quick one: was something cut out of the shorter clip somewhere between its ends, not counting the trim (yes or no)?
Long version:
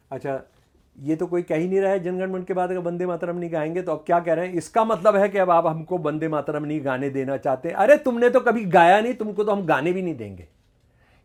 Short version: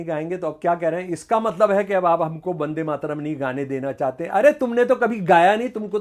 no